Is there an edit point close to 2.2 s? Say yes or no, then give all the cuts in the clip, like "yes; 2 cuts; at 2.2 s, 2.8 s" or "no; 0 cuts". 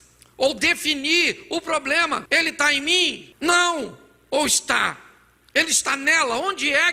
yes; 2 cuts; at 2.2 s, 3.3 s